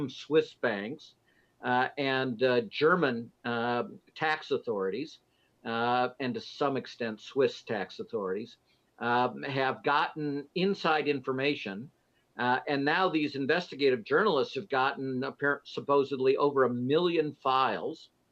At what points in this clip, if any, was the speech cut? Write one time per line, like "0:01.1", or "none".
0:06.4